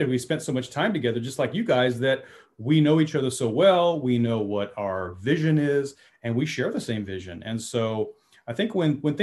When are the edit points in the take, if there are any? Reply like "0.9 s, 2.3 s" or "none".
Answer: none

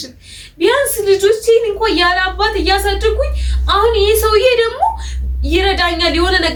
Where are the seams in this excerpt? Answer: none

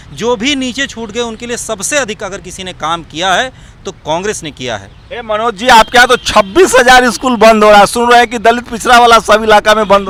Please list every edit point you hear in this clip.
none

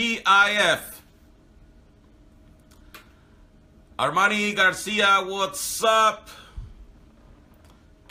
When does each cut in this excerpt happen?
none

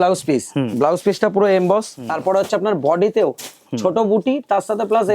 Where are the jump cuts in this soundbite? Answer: 2.0 s

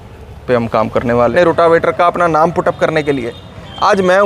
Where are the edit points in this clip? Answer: 1.3 s

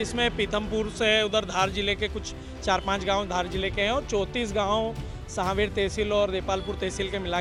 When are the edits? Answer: none

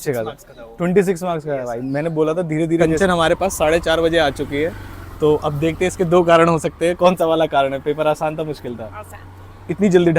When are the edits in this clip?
2.8 s

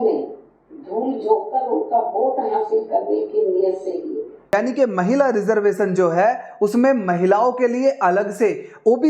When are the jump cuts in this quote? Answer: 4.5 s

